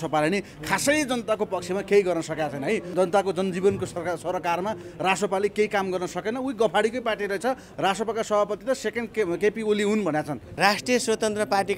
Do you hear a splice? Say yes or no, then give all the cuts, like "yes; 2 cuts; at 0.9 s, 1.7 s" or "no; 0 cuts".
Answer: yes; 2 cuts; at 2.9 s, 10.4 s